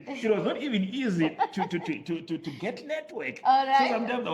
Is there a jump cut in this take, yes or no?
no